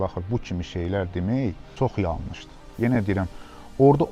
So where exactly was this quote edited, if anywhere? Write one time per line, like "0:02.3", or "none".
0:01.6
0:02.6